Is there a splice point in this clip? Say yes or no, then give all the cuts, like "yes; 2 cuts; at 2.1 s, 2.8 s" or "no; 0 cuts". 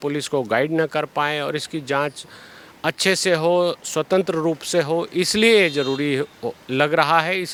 no; 0 cuts